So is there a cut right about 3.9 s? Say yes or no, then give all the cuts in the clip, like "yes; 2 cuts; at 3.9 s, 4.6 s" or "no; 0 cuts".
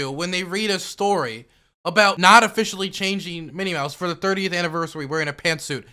no; 1 cut; at 2.2 s